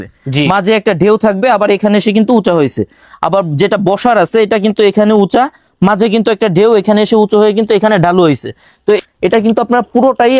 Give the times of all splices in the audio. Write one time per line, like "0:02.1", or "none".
0:09.0